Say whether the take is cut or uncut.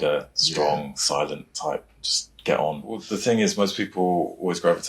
cut